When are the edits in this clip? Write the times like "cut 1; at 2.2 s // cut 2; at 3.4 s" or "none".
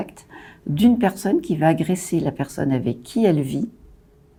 none

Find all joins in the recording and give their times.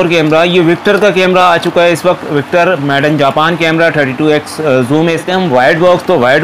cut 1; at 5.2 s

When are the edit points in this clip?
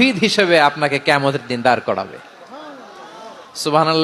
none

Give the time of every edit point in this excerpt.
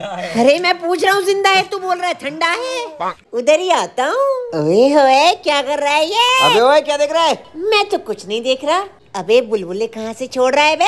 cut 1; at 3.2 s // cut 2; at 8.9 s

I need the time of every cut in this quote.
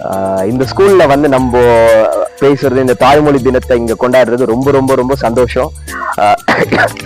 none

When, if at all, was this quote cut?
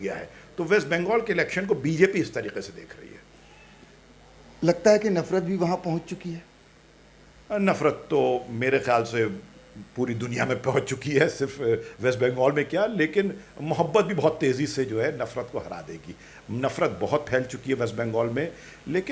none

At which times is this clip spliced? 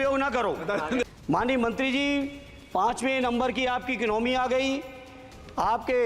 cut 1; at 1.1 s

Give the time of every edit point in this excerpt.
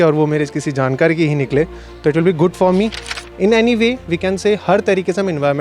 cut 1; at 3.0 s

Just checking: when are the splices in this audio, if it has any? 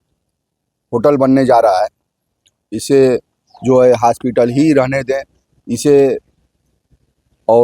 none

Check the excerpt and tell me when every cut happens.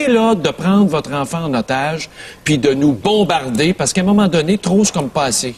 none

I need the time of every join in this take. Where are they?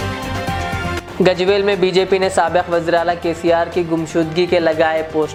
none

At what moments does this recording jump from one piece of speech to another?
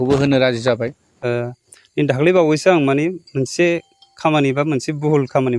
cut 1; at 1.0 s

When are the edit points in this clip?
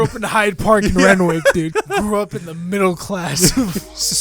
cut 1; at 1.7 s

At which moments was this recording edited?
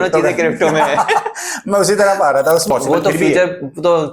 cut 1; at 2.7 s

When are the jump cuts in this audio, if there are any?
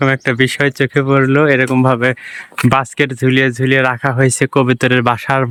none

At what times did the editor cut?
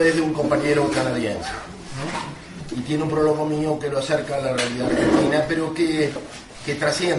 cut 1; at 3.9 s

